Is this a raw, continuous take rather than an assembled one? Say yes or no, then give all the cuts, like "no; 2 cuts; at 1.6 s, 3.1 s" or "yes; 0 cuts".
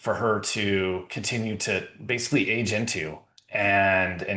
yes; 0 cuts